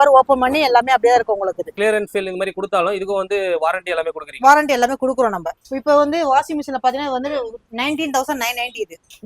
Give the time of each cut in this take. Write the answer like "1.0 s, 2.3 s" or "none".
1.7 s, 5.5 s